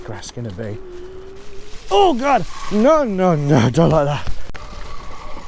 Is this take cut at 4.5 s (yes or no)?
yes